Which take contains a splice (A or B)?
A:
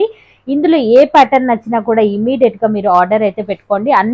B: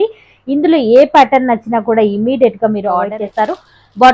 B